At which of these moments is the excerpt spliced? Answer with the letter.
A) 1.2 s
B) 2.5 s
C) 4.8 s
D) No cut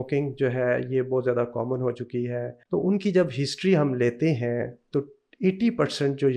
B